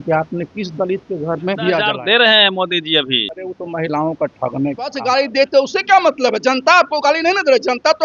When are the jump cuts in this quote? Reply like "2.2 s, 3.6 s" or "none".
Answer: 1.9 s, 3.4 s, 5.0 s